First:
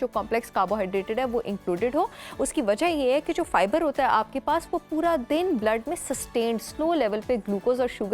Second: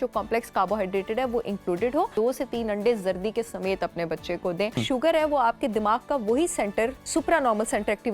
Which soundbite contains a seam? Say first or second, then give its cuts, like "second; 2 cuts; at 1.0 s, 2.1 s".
second; 3 cuts; at 2.1 s, 4.8 s, 7.0 s